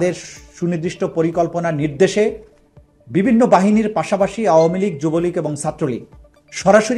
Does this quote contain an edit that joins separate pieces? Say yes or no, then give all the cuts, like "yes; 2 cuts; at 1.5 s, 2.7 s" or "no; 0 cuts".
no; 0 cuts